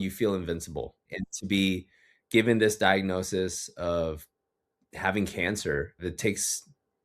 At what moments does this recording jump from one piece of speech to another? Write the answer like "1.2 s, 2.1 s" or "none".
1.1 s, 6.0 s